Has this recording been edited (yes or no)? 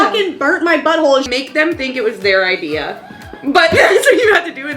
yes